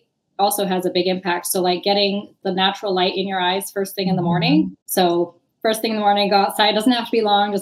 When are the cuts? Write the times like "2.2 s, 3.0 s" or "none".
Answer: 4.8 s